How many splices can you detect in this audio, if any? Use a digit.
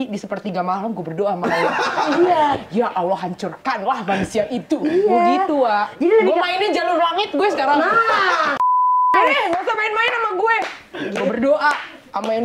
0